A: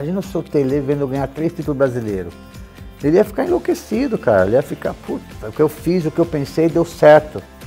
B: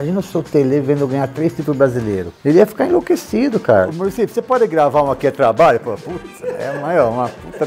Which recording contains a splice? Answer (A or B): B